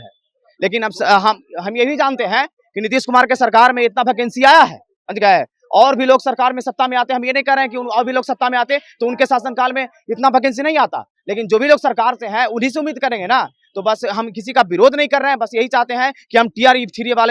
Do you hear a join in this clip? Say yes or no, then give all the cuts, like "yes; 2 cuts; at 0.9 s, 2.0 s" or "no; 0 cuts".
no; 0 cuts